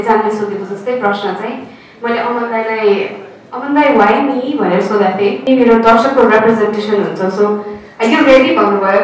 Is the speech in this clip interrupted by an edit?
yes; 1 cut; at 5.4 s

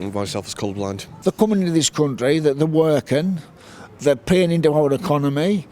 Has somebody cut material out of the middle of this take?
yes; 1 cut; at 1.1 s

